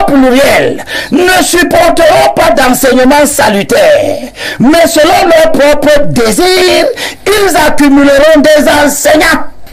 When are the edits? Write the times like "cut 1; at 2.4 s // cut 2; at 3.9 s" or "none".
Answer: none